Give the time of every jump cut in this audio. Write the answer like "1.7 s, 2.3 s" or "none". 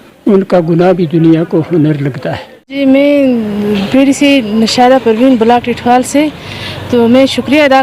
2.8 s